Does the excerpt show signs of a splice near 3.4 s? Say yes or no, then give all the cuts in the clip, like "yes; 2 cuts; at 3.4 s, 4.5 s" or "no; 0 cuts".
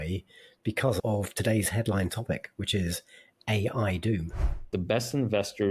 no; 2 cuts; at 1.0 s, 4.7 s